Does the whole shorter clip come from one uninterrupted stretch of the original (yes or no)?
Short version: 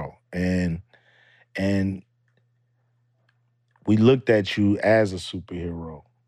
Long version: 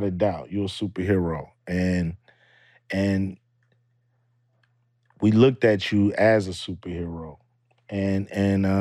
yes